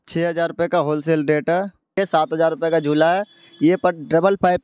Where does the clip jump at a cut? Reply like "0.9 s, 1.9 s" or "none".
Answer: 2.0 s